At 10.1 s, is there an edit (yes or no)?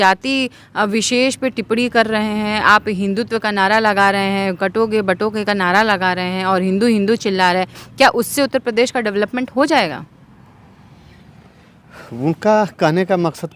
no